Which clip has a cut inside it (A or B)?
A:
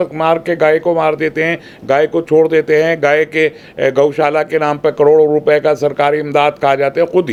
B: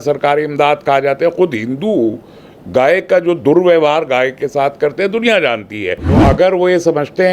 B